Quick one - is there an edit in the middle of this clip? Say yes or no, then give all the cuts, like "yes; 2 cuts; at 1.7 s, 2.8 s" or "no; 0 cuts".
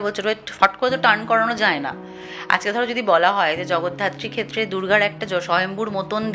no; 0 cuts